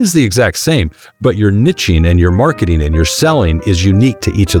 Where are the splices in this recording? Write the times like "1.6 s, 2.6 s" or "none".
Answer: none